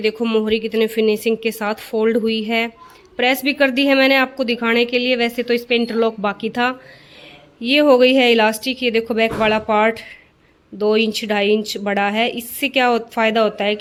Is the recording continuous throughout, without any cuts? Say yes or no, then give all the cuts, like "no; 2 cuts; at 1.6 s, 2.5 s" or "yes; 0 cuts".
yes; 0 cuts